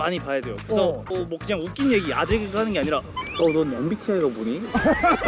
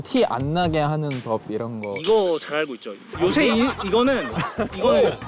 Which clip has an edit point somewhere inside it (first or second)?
first